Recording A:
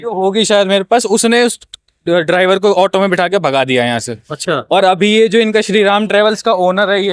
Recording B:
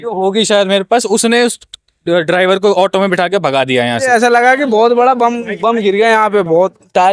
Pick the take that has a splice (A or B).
B